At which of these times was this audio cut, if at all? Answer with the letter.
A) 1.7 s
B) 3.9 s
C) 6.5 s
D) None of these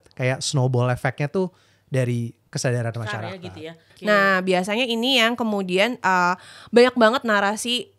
B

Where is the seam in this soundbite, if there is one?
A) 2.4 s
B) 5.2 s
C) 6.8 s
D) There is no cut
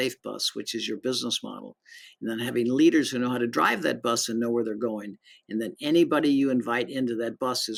D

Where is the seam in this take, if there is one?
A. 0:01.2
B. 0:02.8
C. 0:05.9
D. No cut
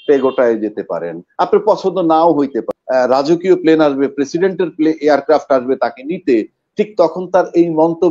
B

